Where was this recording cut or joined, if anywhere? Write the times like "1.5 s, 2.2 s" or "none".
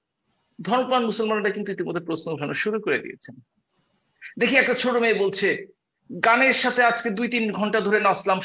none